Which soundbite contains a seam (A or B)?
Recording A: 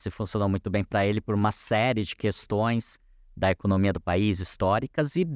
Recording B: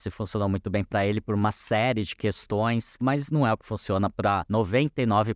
B